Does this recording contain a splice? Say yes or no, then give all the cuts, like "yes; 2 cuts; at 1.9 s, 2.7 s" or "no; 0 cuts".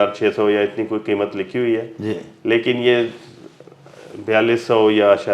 no; 0 cuts